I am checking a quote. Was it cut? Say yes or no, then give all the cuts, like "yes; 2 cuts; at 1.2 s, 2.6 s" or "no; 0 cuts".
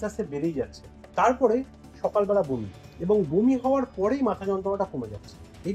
no; 0 cuts